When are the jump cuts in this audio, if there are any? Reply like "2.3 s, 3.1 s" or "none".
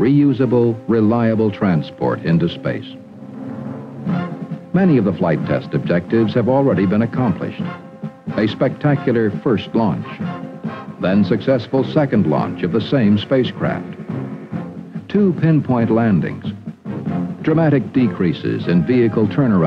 1.0 s

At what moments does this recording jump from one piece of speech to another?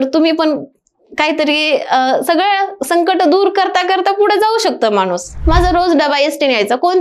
5.3 s

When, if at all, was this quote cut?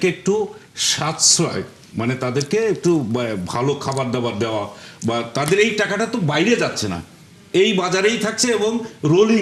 none

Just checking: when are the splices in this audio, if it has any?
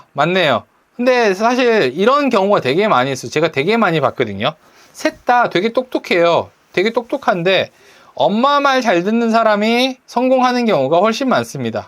10.0 s

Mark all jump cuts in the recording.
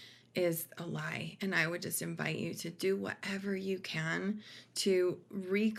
none

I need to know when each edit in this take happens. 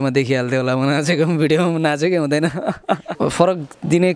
3.1 s

